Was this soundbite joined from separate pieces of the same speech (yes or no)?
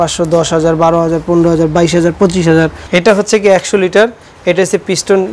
no